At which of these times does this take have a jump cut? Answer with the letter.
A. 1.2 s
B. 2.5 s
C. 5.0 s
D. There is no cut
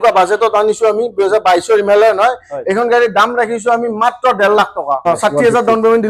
D